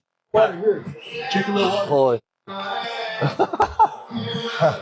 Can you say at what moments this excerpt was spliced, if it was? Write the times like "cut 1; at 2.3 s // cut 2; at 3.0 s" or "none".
cut 1; at 3.6 s